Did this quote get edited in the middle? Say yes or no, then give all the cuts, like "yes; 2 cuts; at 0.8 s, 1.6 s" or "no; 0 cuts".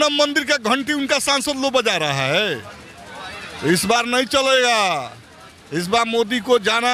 no; 0 cuts